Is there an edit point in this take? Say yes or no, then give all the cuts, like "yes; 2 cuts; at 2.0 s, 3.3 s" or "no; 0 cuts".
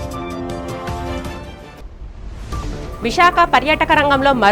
no; 0 cuts